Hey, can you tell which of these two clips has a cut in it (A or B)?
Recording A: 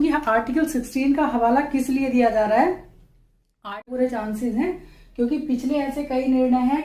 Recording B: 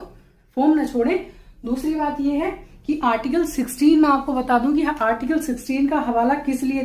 A